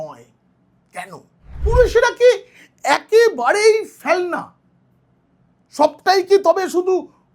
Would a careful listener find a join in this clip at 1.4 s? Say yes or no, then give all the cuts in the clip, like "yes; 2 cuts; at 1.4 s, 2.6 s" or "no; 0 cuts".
yes; 1 cut; at 1.4 s